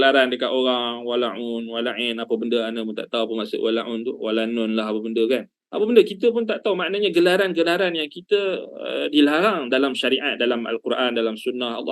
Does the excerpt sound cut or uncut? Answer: uncut